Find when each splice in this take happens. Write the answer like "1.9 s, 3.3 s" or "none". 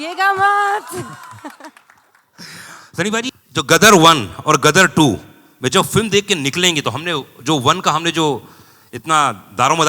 3.3 s